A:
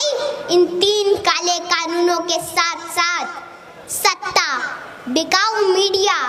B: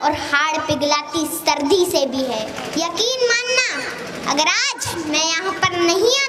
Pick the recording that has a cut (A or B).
B